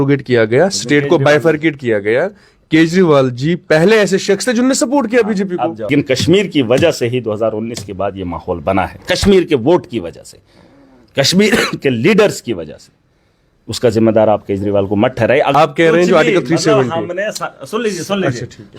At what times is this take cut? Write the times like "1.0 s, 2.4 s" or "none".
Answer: 5.9 s, 15.5 s